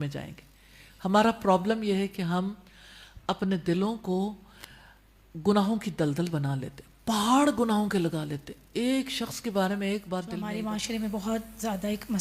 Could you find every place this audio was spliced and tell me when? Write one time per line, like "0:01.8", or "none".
0:10.4